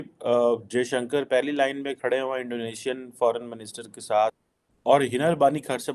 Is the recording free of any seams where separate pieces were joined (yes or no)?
no